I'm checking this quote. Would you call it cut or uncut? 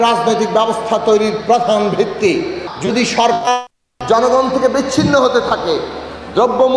cut